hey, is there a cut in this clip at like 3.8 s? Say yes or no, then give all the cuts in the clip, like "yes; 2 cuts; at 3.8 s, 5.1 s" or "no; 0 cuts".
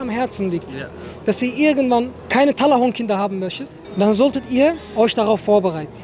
no; 0 cuts